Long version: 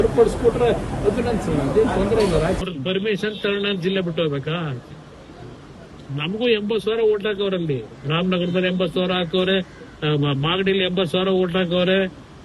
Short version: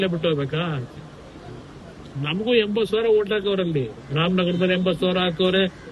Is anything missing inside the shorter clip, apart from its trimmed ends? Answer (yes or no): no